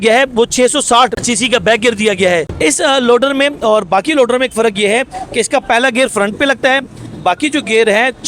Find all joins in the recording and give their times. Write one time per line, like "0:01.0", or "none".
0:02.5